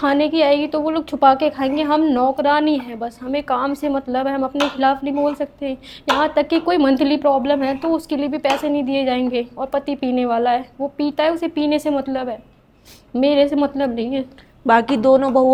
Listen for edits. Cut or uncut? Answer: uncut